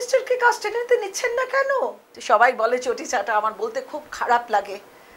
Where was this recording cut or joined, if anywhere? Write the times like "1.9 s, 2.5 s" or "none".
2.1 s